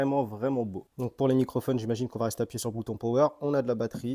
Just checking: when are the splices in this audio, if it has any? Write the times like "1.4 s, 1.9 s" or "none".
0.9 s

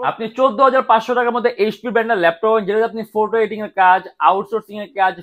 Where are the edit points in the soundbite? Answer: none

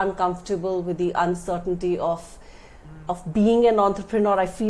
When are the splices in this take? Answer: none

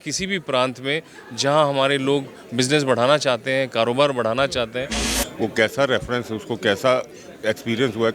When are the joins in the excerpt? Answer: 5.0 s

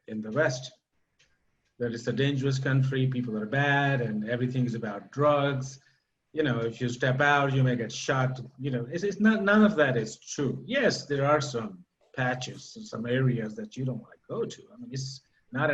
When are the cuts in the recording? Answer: none

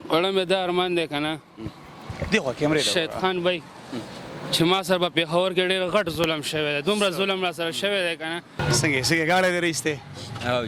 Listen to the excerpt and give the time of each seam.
8.6 s

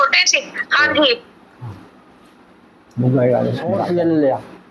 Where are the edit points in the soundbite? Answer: 3.8 s

